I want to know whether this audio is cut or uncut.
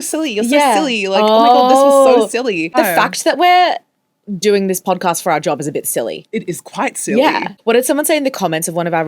cut